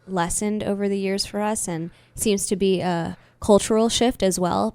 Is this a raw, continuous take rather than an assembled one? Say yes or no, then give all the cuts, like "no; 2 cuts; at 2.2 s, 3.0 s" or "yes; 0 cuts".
yes; 0 cuts